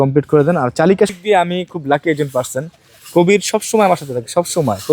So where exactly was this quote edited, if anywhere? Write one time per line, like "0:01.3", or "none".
0:01.2